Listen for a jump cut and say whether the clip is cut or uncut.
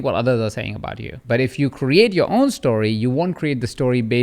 cut